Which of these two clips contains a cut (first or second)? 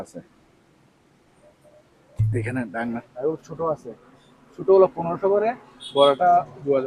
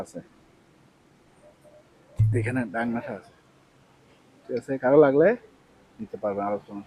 first